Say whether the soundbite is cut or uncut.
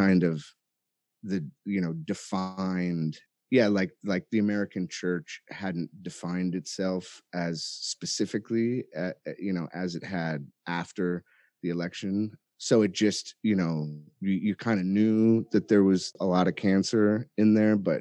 cut